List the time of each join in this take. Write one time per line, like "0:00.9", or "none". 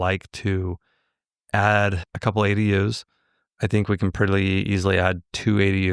0:02.1